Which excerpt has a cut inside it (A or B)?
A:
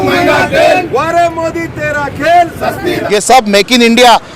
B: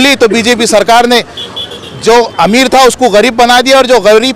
A